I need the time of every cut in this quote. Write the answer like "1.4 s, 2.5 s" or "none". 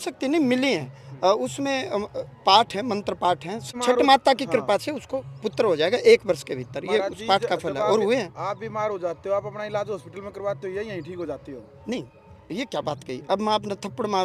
3.7 s